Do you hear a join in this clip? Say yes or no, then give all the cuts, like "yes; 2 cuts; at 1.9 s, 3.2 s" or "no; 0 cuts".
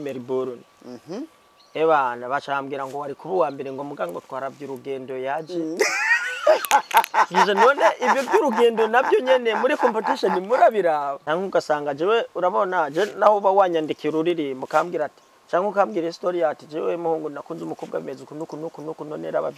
yes; 1 cut; at 11.2 s